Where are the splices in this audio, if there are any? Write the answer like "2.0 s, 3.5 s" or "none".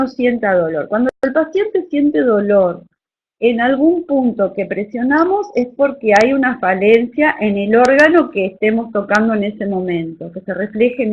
10.0 s